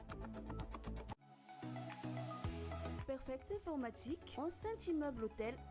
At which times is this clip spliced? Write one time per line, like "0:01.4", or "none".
0:00.9